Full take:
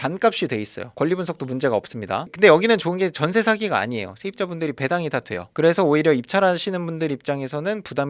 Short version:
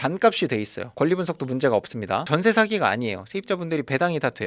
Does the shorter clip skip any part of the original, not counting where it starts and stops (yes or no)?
yes